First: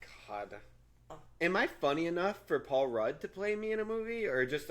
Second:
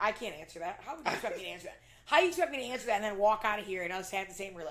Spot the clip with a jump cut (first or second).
first